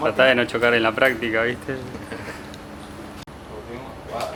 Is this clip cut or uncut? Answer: uncut